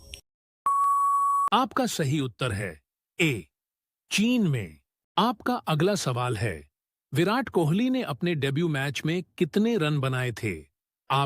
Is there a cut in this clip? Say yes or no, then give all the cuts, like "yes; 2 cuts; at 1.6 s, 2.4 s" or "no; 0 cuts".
yes; 1 cut; at 1.5 s